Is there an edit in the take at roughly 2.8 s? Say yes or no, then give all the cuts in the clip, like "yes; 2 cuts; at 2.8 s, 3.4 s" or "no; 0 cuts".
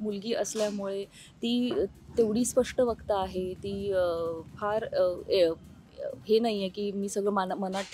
no; 0 cuts